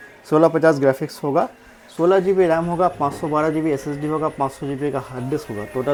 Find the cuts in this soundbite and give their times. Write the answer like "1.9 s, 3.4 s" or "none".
none